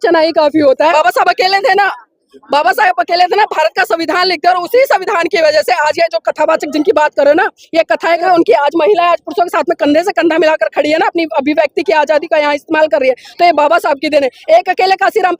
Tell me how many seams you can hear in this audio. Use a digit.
2